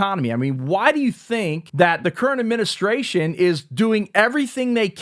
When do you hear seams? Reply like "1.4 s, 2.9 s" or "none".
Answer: 1.6 s